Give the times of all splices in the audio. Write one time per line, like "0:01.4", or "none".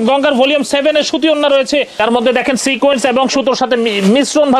0:01.9

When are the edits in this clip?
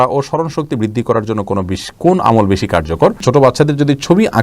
0:03.2

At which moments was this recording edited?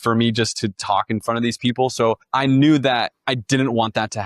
0:02.2
0:03.2

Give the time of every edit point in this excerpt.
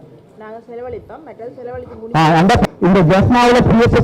0:02.6

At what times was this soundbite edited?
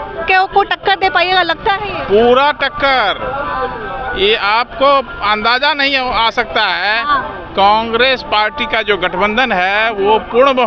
none

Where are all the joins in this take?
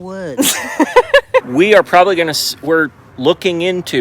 0:01.5

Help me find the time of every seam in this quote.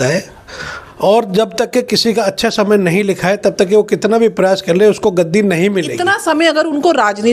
0:05.9

